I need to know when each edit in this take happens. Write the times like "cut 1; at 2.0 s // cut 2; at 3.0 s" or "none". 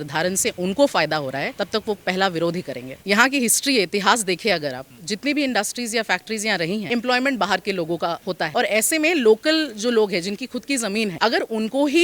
cut 1; at 3.0 s // cut 2; at 6.8 s // cut 3; at 11.1 s